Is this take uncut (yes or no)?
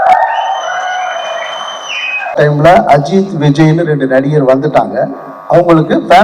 no